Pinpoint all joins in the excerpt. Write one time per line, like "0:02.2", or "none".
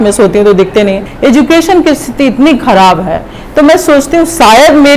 0:01.1